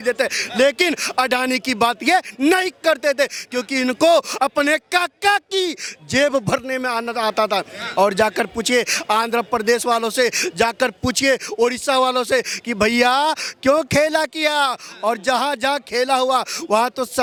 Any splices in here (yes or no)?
no